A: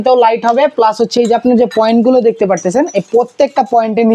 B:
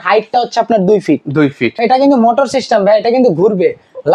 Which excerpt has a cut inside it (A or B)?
B